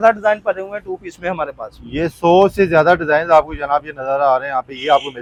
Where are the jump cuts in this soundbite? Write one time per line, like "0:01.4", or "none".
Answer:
none